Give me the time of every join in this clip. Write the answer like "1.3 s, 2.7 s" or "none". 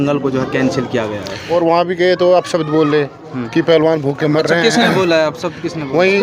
1.3 s